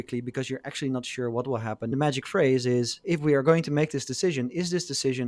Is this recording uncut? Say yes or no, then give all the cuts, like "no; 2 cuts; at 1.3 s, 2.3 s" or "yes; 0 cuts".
no; 2 cuts; at 1.9 s, 3.0 s